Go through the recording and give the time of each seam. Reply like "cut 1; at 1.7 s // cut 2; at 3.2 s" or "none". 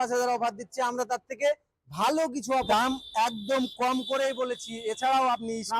cut 1; at 2.7 s